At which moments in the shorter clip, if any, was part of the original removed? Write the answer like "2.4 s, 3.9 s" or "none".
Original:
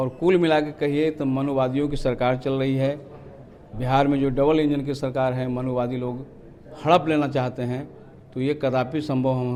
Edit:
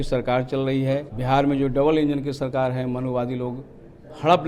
1.1 s